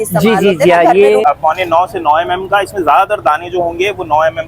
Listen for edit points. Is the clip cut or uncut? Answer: cut